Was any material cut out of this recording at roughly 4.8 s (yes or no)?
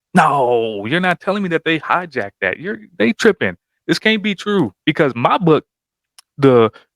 yes